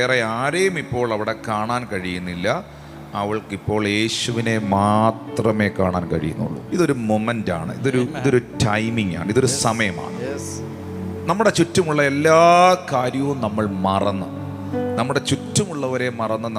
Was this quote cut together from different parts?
no; 0 cuts

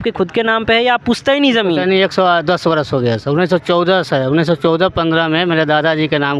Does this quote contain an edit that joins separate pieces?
no; 0 cuts

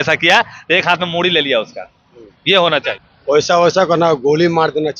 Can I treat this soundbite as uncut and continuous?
no; 1 cut; at 3.0 s

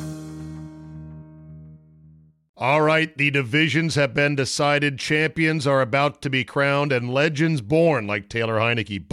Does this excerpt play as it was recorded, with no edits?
no; 1 cut; at 2.3 s

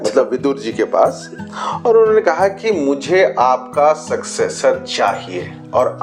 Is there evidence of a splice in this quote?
no; 0 cuts

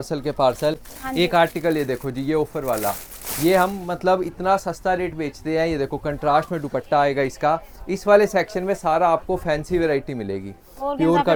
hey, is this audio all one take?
yes; 0 cuts

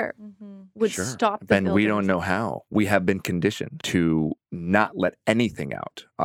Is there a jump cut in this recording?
yes; 3 cuts; at 2.6 s, 3.7 s, 4.5 s

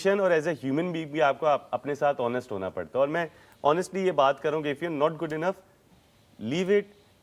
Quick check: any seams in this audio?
no; 0 cuts

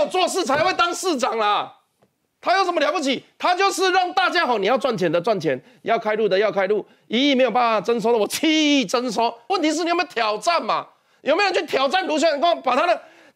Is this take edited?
no; 0 cuts

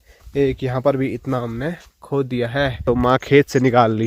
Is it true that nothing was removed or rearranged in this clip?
no; 1 cut; at 2.8 s

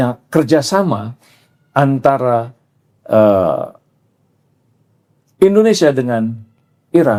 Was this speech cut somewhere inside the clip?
no; 0 cuts

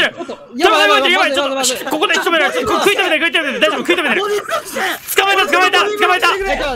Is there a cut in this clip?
no; 0 cuts

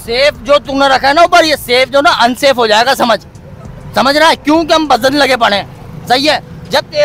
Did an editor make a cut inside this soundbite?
no; 0 cuts

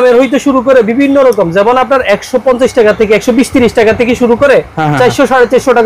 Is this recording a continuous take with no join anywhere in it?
yes; 0 cuts

